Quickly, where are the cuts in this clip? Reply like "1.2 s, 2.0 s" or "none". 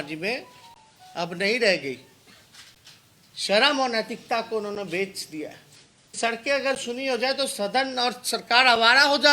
6.2 s